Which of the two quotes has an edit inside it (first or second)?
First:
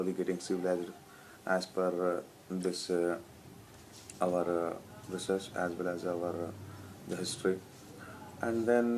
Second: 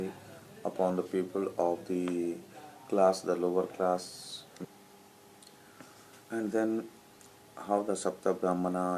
second